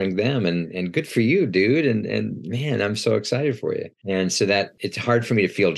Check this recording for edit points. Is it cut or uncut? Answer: cut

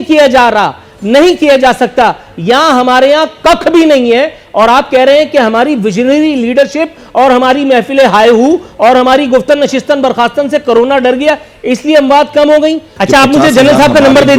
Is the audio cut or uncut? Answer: cut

